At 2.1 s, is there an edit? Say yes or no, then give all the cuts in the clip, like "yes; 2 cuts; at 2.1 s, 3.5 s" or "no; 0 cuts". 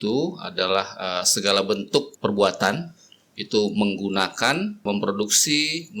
yes; 2 cuts; at 2.1 s, 4.8 s